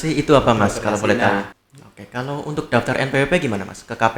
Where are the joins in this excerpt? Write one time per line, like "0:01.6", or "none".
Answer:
0:01.5